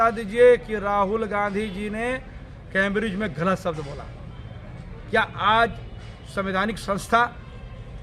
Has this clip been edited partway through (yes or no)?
no